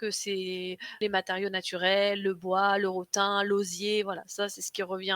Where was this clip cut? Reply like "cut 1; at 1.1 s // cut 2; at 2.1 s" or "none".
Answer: cut 1; at 1.0 s

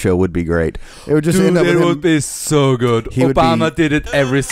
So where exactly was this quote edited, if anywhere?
none

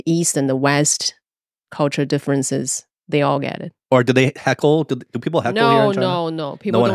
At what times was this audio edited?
cut 1; at 3.9 s

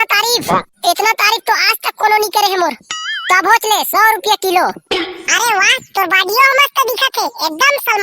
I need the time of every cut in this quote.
cut 1; at 2.8 s

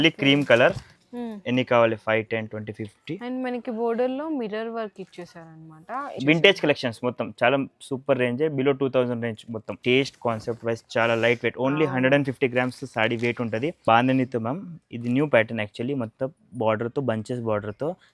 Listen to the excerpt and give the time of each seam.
cut 1; at 6.2 s // cut 2; at 9.7 s // cut 3; at 13.8 s

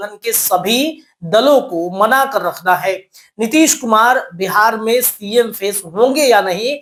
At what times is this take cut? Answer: none

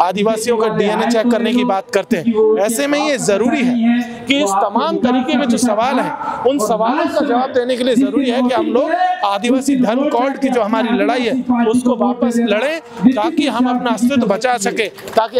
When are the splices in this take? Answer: none

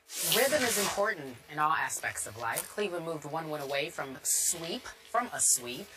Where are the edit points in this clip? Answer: cut 1; at 1.2 s

